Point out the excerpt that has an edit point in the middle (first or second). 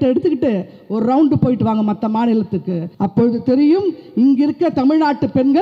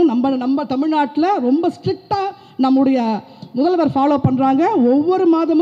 first